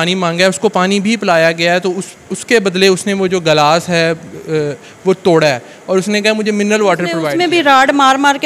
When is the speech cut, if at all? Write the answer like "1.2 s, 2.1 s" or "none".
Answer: 7.2 s

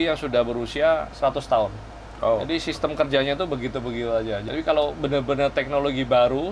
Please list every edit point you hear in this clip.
1.1 s, 4.4 s

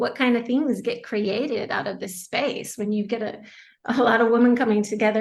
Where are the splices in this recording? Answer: none

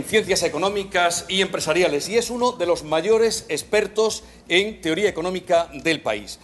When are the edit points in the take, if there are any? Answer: none

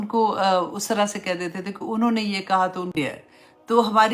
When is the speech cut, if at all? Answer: 2.9 s

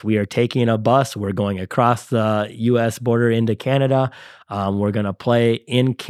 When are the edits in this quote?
none

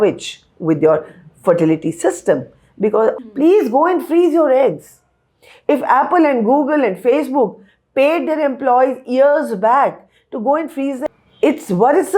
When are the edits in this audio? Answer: 3.2 s, 11.1 s

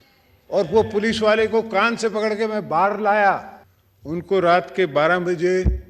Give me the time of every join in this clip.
3.5 s

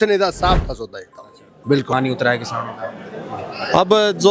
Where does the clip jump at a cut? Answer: 1.9 s

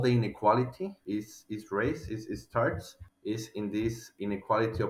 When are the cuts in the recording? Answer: none

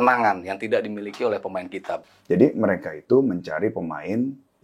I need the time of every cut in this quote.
2.1 s

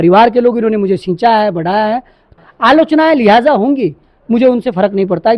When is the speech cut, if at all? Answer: 2.3 s

